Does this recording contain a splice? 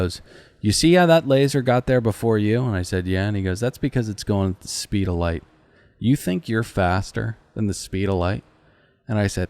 no; 0 cuts

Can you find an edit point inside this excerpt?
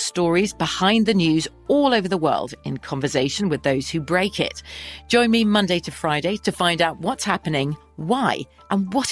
no; 0 cuts

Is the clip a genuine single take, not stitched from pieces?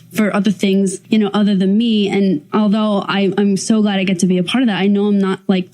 no; 2 cuts; at 1.0 s, 2.4 s

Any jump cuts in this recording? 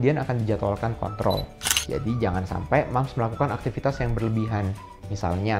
yes; 1 cut; at 1.7 s

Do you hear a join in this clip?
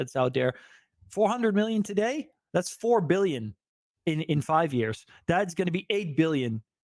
no; 0 cuts

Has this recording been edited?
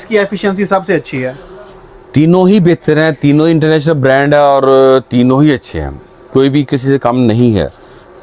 no; 0 cuts

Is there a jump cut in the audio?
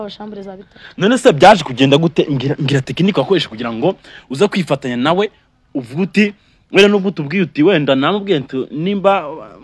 no; 0 cuts

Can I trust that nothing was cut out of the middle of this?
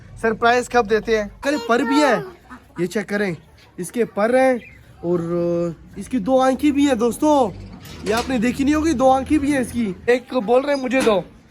no; 2 cuts; at 1.4 s, 10.0 s

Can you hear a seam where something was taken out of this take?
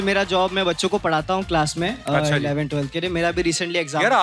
no; 0 cuts

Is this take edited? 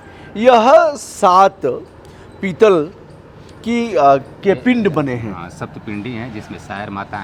no; 0 cuts

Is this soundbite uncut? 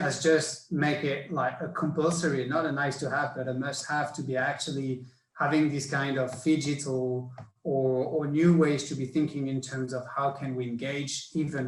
yes; 0 cuts

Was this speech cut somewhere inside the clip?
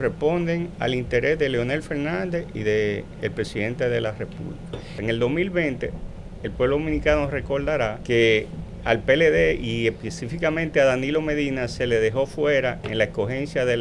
yes; 2 cuts; at 4.9 s, 8.0 s

